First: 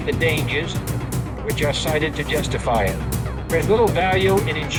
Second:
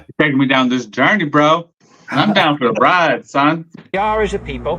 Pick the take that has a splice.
second; 1 cut; at 3.7 s

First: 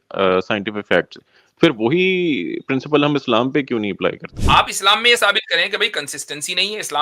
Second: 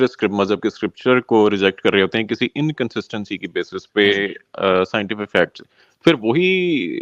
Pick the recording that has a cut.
first; 1 cut; at 4.3 s

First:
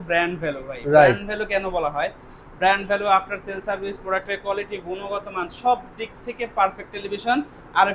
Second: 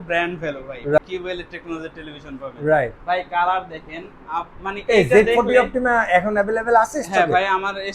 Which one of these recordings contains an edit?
second; 1 cut; at 1.0 s

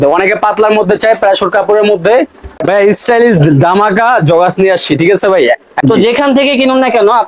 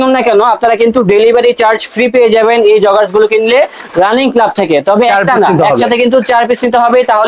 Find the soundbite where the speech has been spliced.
first; 2 cuts; at 2.5 s, 5.7 s

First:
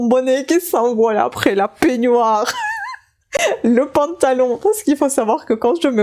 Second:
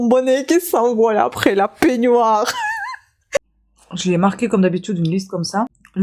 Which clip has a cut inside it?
second; 1 cut; at 3.4 s

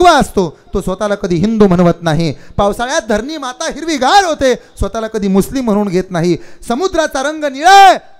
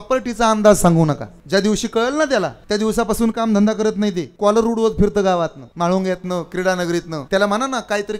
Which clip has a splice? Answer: second; 5 cuts; at 1.3 s, 2.6 s, 4.3 s, 5.6 s, 7.2 s

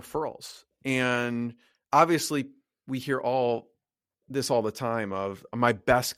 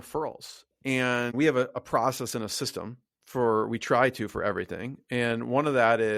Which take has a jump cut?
second; 1 cut; at 1.3 s

